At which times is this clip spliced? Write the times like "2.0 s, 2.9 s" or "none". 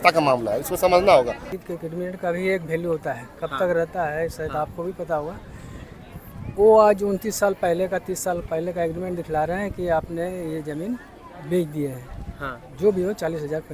1.6 s